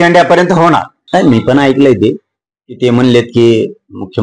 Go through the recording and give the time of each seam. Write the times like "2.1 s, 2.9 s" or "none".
0.9 s